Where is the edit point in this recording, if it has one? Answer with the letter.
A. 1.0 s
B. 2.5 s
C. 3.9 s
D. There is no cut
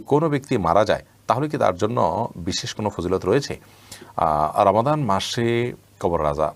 D